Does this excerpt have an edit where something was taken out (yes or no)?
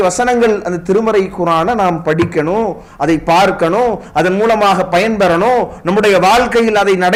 no